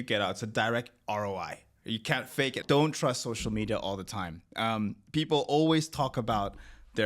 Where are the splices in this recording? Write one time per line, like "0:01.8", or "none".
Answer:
0:02.6